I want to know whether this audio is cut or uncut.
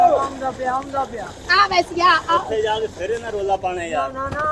uncut